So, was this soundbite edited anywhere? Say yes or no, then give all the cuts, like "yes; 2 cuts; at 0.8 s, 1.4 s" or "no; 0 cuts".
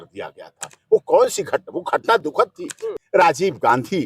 yes; 1 cut; at 2.8 s